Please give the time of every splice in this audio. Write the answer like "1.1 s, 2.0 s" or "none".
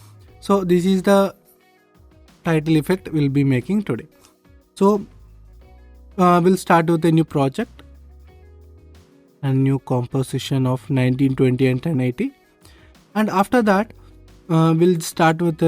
7.7 s, 9.4 s